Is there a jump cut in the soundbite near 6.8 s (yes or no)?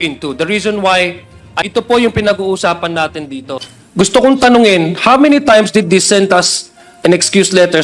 no